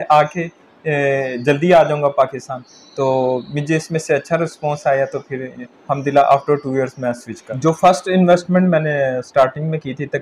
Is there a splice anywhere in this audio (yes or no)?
yes